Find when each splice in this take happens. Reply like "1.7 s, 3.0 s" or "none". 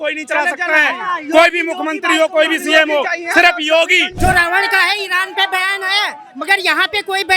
4.1 s